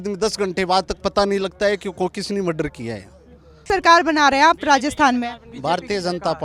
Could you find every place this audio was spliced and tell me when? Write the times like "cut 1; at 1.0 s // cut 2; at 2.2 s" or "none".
cut 1; at 3.7 s